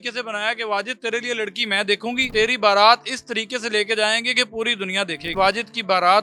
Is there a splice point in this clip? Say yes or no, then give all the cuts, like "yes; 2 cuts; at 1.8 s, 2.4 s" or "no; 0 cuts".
yes; 2 cuts; at 2.2 s, 5.3 s